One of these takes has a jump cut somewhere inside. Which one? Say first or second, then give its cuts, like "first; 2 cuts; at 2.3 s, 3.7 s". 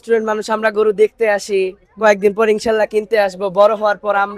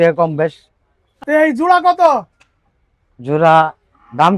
second; 1 cut; at 1.2 s